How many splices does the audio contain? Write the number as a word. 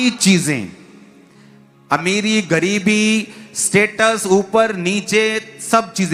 zero